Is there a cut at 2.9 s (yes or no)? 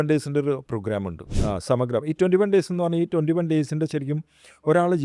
no